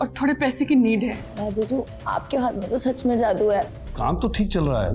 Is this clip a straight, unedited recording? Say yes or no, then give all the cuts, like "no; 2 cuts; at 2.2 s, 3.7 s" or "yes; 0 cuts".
no; 2 cuts; at 1.3 s, 3.8 s